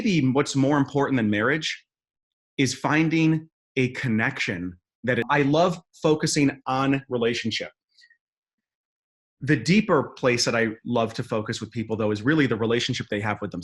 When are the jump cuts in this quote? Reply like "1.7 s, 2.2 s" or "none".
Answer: 5.3 s